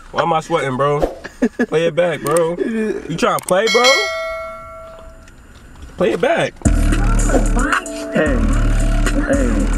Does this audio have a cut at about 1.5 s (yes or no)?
no